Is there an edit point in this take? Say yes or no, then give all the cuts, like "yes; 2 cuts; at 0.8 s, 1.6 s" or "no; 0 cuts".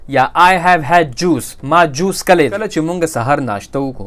yes; 1 cut; at 2.7 s